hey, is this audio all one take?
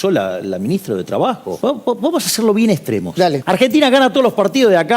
no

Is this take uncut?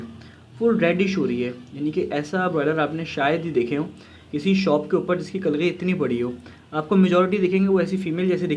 yes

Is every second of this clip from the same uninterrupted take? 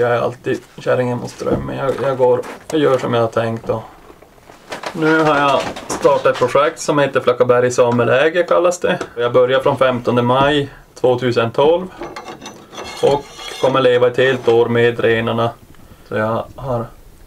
yes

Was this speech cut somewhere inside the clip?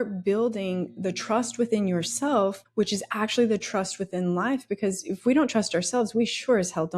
yes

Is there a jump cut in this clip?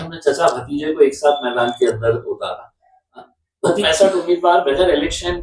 yes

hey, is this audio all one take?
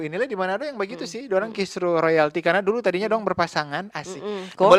yes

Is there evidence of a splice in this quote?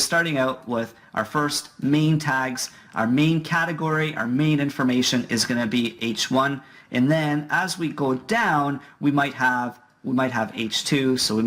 yes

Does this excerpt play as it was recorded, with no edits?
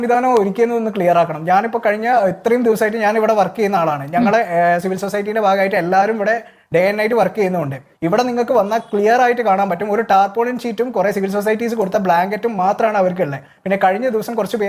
yes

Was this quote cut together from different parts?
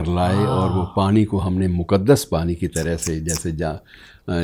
no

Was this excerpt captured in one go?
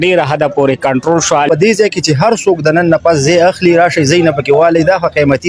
no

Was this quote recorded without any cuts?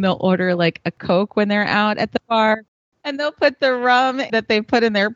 no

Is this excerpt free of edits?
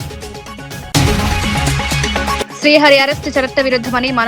no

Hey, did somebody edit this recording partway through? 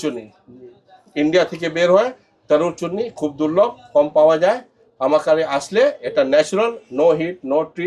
no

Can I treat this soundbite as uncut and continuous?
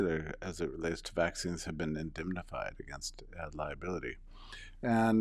yes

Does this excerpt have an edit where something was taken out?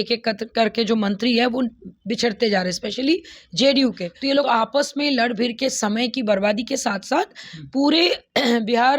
yes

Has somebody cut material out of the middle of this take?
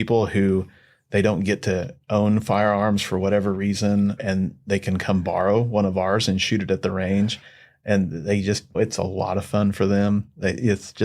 yes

